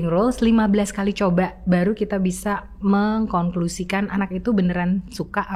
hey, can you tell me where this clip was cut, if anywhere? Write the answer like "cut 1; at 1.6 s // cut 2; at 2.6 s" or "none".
none